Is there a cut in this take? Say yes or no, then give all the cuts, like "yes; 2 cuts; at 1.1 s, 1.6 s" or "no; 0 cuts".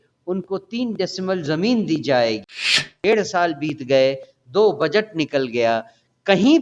yes; 1 cut; at 2.9 s